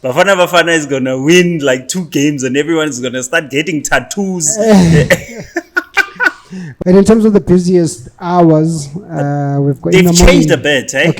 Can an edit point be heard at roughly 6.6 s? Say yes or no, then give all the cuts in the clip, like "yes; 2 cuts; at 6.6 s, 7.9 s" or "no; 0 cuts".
yes; 1 cut; at 6.6 s